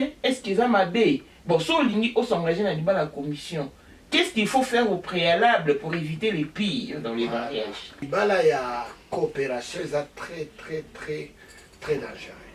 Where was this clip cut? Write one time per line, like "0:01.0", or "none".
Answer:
0:08.0